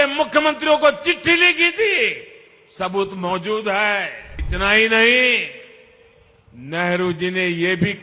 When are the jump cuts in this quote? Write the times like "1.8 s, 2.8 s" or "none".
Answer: 4.4 s